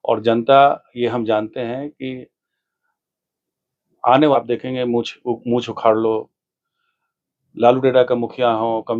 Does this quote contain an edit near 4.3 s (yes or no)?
yes